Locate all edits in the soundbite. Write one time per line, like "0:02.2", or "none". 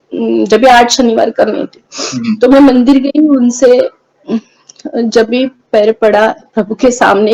none